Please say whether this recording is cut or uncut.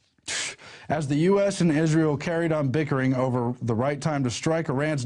cut